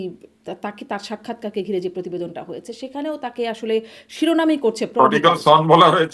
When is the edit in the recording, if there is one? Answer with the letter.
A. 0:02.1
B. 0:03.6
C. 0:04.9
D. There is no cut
D